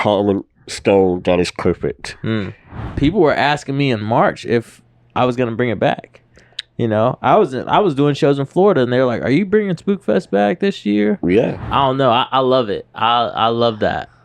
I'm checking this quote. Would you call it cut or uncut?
cut